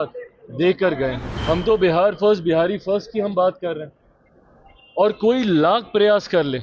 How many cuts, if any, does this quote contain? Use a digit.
1